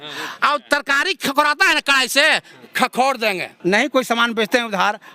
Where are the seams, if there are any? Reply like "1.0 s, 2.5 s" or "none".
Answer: 3.5 s